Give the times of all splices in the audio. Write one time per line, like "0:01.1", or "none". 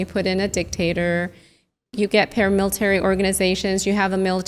0:01.8